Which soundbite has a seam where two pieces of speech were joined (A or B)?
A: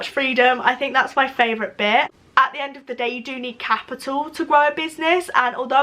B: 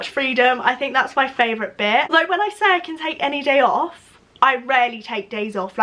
A